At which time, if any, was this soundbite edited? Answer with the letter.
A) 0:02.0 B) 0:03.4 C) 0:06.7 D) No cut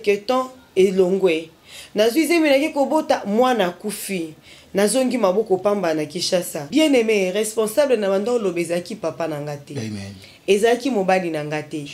C